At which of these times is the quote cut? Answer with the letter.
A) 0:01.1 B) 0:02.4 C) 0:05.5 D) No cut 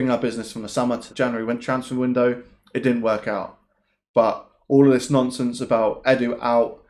A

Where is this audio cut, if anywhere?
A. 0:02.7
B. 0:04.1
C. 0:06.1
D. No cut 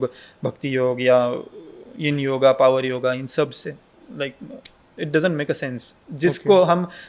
D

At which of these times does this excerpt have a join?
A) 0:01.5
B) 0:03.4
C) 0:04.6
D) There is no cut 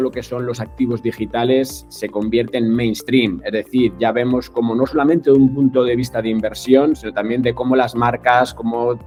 D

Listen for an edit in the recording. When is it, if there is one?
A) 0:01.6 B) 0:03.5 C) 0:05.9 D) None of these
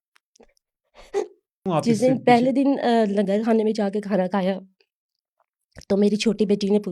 A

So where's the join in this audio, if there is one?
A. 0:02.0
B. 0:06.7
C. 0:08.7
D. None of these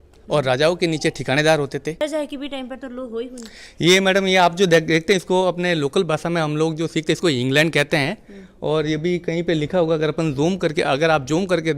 A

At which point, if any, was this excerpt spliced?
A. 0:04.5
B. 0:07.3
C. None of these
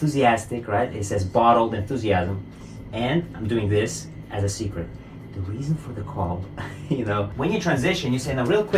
B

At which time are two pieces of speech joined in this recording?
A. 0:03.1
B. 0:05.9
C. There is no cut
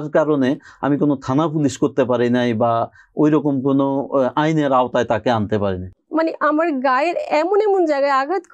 B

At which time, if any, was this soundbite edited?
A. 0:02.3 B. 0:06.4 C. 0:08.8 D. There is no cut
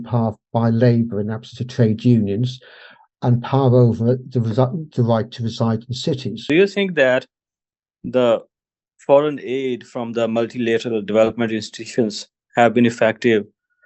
B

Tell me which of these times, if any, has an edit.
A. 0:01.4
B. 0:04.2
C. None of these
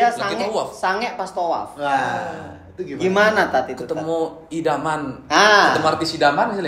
C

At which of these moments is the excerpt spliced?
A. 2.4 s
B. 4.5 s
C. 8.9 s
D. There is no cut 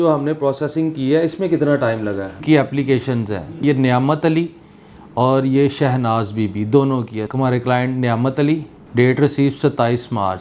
A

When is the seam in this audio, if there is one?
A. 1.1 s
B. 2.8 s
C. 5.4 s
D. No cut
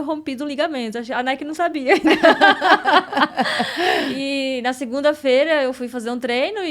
D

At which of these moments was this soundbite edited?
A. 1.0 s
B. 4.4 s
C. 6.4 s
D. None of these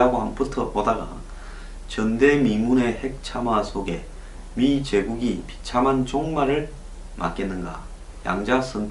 D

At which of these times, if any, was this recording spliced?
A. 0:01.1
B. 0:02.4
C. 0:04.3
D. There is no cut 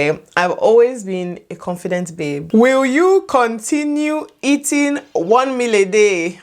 B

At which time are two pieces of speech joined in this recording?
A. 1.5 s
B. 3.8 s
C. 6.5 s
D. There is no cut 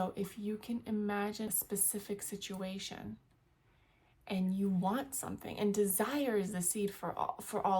A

